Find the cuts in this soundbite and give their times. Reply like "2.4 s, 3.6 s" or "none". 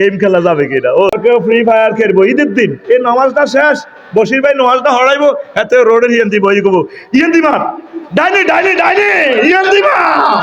1.1 s